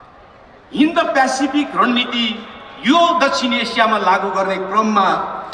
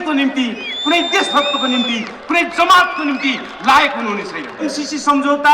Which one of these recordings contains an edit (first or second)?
second